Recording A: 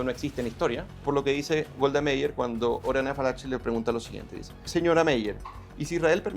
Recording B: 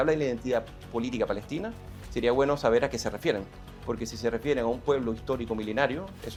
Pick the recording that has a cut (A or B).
A